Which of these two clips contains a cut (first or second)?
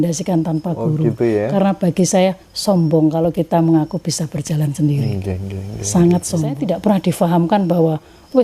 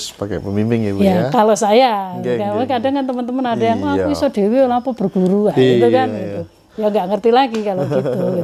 first